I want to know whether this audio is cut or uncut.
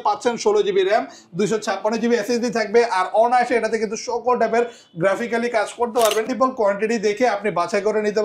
cut